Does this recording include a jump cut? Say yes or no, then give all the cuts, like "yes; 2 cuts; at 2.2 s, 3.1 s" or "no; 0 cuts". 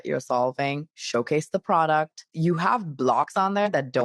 yes; 1 cut; at 2.3 s